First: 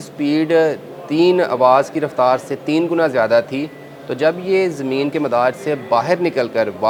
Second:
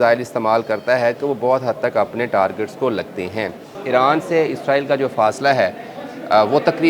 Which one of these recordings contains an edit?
second; 1 cut; at 3.7 s

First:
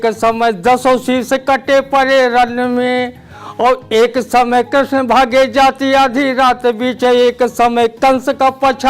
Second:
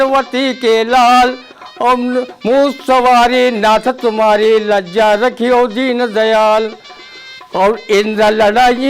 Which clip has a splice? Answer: second; 1 cut; at 7.0 s

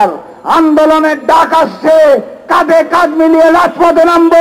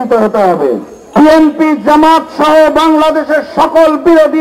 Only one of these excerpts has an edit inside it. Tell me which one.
second; 1 cut; at 0.9 s

